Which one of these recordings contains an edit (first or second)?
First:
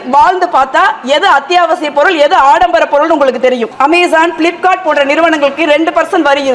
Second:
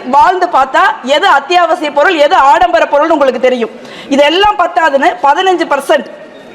first